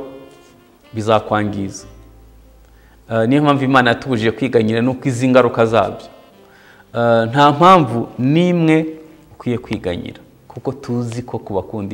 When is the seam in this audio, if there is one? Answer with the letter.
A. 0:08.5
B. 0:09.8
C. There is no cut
C